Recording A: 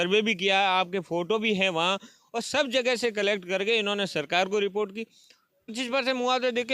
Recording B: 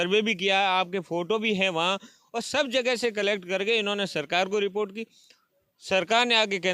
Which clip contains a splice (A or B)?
A